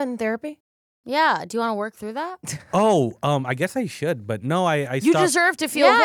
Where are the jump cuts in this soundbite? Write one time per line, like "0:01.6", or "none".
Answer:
none

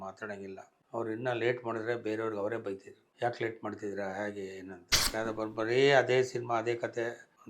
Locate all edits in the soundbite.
0:05.0

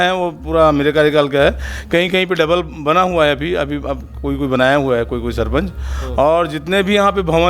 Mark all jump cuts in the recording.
none

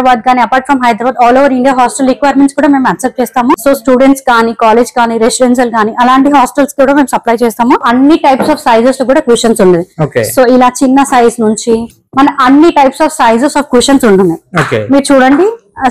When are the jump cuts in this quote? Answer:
0:03.6
0:07.8

